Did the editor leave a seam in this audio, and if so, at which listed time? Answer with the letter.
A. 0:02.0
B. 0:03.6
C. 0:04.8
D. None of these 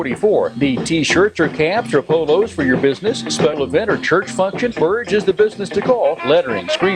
B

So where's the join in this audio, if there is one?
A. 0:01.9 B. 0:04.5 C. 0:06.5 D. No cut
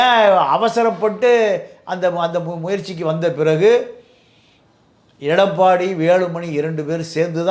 D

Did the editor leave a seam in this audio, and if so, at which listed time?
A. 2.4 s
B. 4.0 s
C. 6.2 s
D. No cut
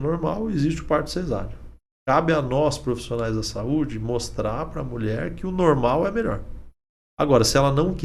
D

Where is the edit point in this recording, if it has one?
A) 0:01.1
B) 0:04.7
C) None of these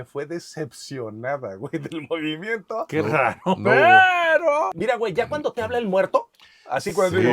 B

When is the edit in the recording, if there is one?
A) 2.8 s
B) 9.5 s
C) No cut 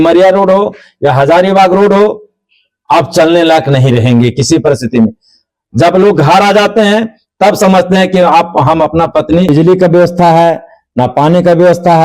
B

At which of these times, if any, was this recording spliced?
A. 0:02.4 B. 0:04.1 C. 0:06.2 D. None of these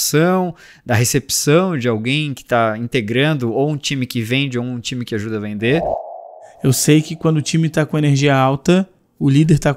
C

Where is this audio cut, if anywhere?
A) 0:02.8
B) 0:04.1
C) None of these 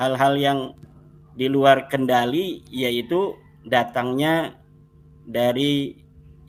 C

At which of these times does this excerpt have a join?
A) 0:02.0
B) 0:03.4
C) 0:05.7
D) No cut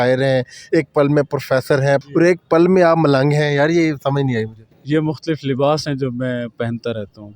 A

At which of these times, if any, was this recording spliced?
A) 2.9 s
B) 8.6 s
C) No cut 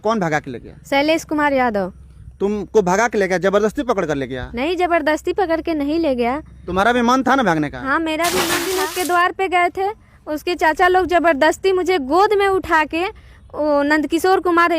B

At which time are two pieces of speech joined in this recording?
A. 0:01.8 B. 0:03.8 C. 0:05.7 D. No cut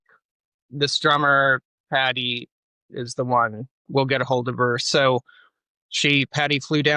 B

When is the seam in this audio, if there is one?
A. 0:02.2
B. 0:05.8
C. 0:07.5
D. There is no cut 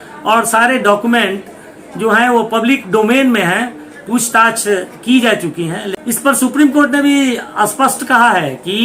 B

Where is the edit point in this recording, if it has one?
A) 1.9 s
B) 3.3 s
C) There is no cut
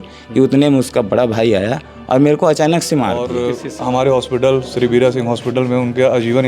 B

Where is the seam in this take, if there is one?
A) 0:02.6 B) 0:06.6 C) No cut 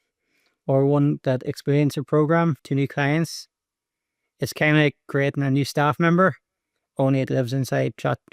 A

